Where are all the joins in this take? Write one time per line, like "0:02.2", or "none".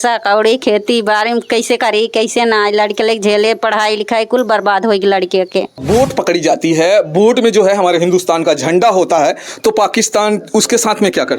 0:05.8